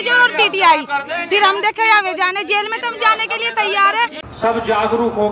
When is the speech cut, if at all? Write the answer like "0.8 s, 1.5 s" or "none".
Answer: 4.2 s